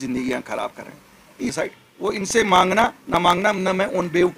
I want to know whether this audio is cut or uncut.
cut